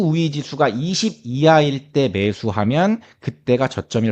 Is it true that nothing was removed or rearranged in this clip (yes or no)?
yes